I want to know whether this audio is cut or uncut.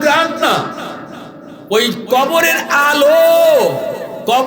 uncut